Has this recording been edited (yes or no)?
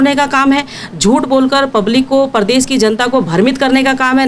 no